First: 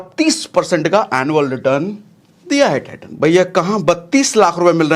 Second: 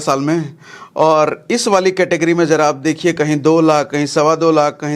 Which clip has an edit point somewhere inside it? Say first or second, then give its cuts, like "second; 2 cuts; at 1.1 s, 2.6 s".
first; 1 cut; at 3.0 s